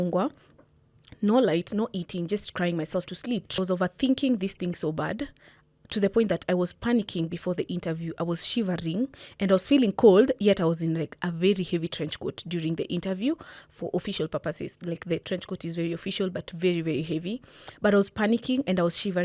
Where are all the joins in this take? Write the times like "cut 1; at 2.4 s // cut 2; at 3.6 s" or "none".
cut 1; at 3.6 s

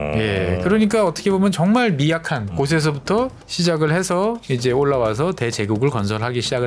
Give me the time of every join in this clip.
none

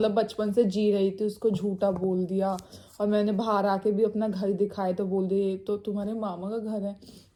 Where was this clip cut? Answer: none

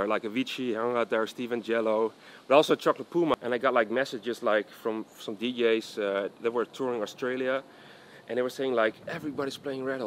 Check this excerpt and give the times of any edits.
cut 1; at 3.3 s

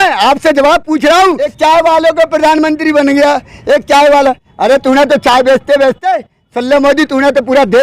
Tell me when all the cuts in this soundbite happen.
cut 1; at 1.5 s

